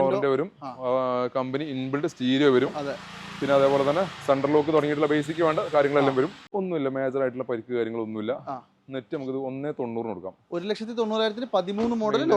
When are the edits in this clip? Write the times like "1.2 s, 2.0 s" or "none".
6.4 s